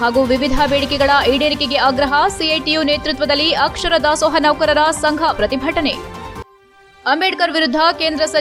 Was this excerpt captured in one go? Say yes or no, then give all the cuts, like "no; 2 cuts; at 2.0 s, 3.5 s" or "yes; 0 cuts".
yes; 0 cuts